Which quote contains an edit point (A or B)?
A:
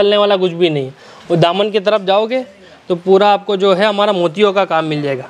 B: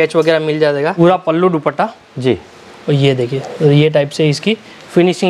B